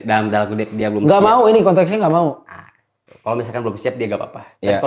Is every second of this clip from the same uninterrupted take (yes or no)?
yes